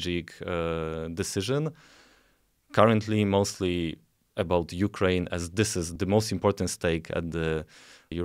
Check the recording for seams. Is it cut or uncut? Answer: uncut